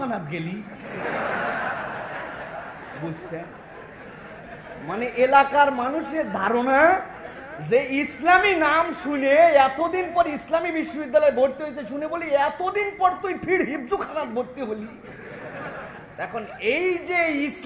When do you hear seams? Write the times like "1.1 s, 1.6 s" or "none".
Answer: none